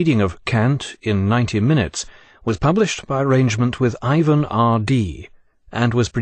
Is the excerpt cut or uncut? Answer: cut